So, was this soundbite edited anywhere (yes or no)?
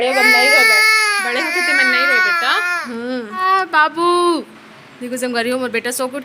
yes